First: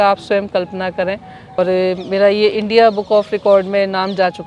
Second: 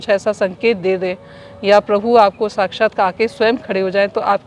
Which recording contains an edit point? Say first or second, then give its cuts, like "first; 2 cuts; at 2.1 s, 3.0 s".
first; 1 cut; at 1.6 s